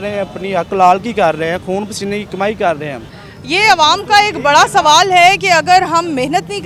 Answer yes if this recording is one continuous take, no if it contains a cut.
yes